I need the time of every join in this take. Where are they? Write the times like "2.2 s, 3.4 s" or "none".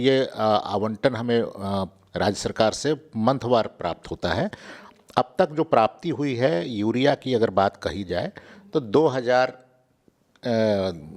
none

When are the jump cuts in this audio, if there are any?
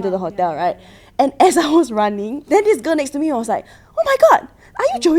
2.3 s

